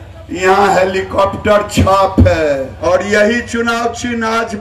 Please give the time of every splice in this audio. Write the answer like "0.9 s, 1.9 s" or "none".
2.8 s